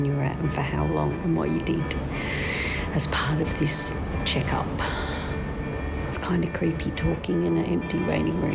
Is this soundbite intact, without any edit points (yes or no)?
no